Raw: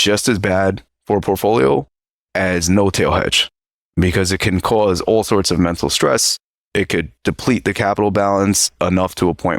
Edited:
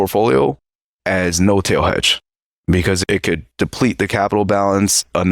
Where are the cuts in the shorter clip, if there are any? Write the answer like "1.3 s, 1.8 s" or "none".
3.0 s